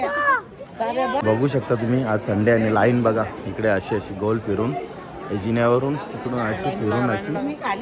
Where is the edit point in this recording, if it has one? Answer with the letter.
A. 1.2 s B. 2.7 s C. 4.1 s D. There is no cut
A